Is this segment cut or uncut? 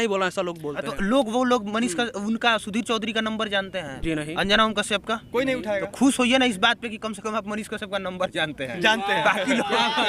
uncut